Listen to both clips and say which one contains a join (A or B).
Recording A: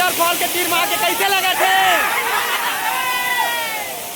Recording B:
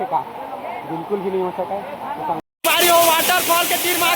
B